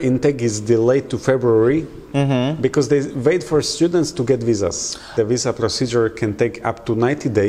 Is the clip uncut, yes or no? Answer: no